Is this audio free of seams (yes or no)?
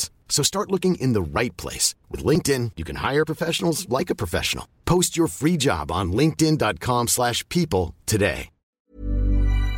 no